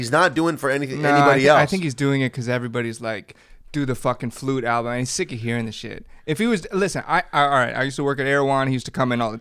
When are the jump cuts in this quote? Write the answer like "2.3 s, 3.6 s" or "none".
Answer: none